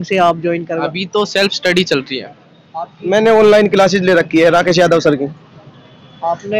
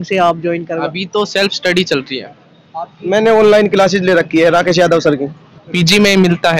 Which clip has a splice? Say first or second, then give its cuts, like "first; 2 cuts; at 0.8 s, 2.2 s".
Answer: second; 1 cut; at 5.6 s